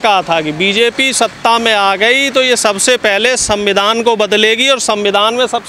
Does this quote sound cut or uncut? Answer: uncut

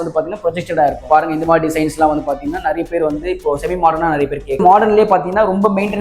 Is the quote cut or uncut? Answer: cut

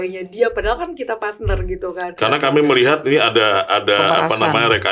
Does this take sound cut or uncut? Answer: cut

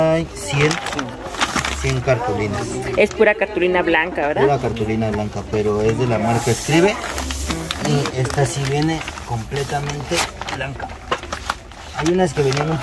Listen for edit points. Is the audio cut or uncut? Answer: uncut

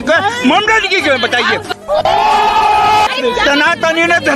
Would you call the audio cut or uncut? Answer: cut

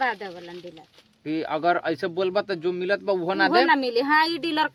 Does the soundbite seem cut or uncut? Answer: uncut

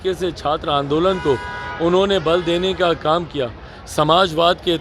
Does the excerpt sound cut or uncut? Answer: uncut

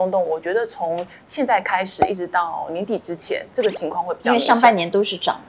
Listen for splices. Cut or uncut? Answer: uncut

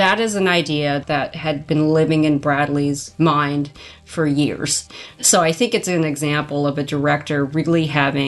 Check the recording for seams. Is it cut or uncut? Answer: cut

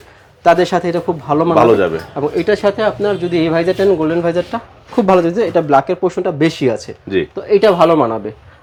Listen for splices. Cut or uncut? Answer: uncut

